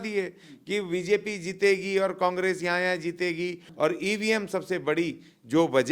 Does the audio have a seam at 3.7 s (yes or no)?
yes